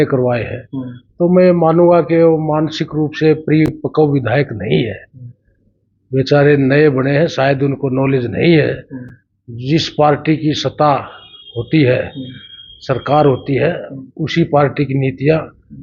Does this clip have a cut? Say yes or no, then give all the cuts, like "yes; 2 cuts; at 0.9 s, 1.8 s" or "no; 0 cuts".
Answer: no; 0 cuts